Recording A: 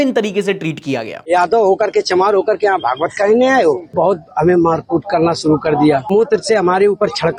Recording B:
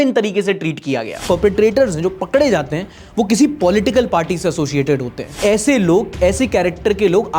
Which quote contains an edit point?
B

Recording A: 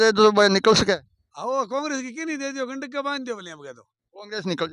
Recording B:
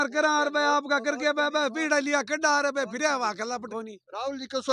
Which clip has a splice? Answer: B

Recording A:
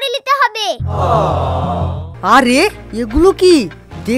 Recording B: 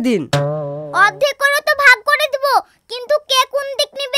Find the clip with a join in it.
A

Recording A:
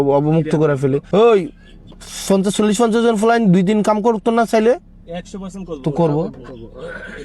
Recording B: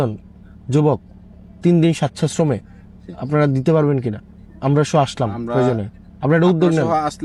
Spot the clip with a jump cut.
A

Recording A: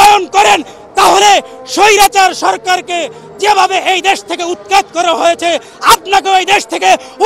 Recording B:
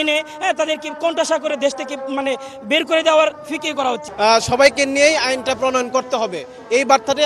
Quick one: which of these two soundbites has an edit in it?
B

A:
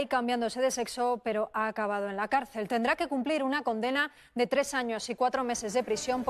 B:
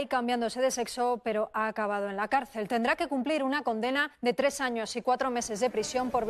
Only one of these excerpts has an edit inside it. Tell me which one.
B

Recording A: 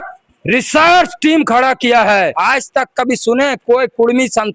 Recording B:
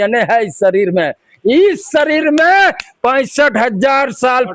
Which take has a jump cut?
A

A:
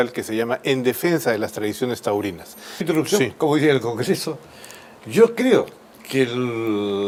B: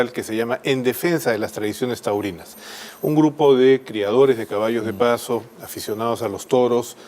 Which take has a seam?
B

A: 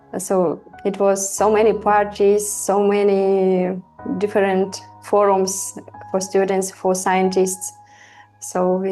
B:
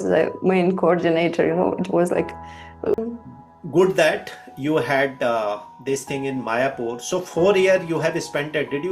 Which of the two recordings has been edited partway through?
B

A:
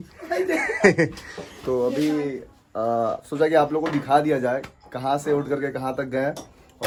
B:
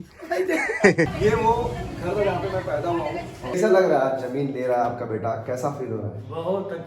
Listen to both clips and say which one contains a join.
B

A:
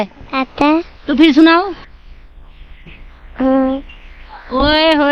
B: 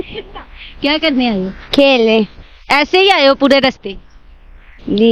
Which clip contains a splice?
B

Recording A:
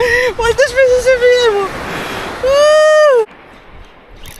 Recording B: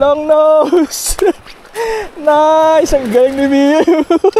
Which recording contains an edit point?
A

